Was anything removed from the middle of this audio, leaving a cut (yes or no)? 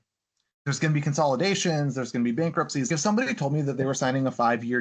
yes